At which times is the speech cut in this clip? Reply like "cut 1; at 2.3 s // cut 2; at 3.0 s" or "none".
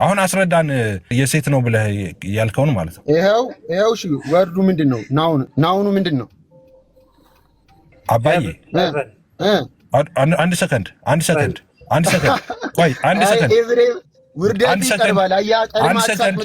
cut 1; at 1.1 s // cut 2; at 5.5 s